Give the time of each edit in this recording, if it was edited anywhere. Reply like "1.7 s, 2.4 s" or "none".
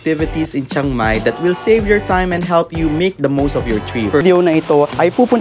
4.2 s